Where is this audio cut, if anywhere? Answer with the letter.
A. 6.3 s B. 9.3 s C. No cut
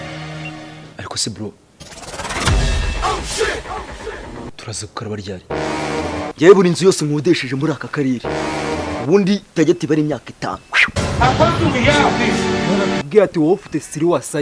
A